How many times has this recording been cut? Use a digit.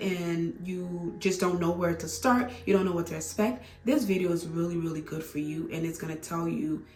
0